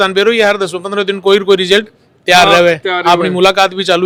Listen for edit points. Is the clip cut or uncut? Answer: uncut